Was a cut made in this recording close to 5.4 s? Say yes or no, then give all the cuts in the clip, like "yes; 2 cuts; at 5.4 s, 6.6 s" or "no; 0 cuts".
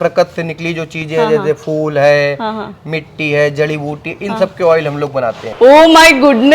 yes; 1 cut; at 5.4 s